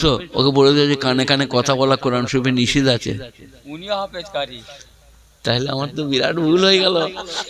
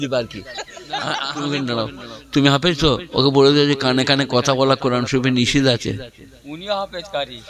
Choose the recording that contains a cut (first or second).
second